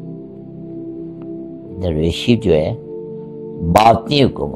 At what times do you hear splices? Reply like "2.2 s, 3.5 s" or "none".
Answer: 1.8 s